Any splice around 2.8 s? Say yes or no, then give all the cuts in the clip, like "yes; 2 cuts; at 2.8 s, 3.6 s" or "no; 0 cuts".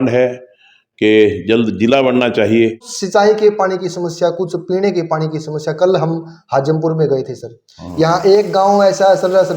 yes; 1 cut; at 2.8 s